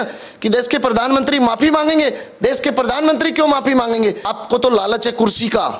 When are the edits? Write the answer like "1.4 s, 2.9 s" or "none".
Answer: 4.3 s

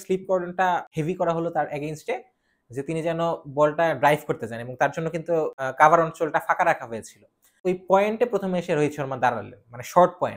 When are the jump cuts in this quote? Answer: 0.9 s, 5.6 s, 7.6 s

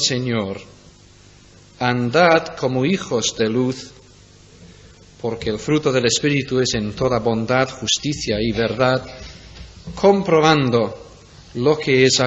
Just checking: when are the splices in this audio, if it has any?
2.3 s

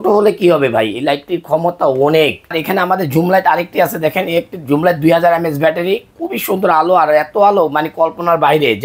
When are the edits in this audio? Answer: 2.6 s

